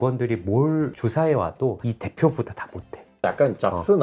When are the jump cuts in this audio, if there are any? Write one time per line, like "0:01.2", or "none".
0:01.8
0:03.0